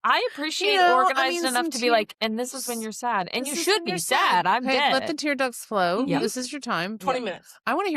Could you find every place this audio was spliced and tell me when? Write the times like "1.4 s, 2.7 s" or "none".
none